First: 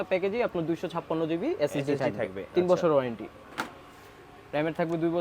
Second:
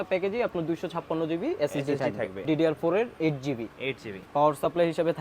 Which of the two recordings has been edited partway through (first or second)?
second